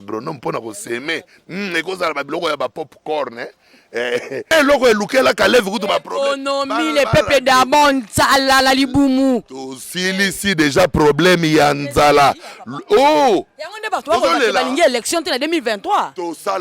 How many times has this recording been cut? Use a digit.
1